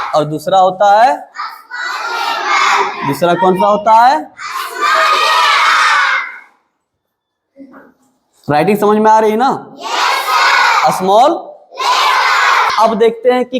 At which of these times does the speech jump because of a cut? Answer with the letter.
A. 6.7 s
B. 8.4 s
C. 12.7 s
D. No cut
C